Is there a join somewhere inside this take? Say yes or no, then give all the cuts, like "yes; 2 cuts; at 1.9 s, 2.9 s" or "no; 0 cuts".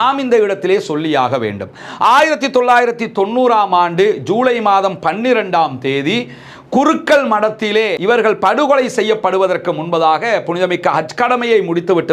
no; 0 cuts